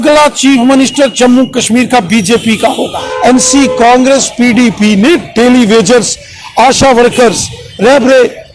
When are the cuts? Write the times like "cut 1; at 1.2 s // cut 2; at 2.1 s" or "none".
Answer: cut 1; at 3.0 s